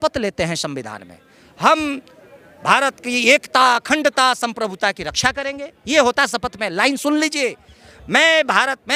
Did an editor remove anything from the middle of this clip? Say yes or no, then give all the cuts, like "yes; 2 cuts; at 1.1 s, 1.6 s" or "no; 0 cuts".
no; 0 cuts